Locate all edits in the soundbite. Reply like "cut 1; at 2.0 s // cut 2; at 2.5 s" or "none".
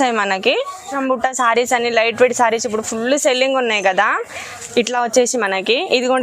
cut 1; at 0.9 s